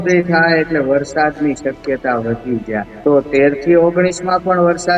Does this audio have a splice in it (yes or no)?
yes